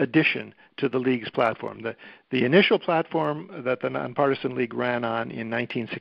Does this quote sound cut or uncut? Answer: uncut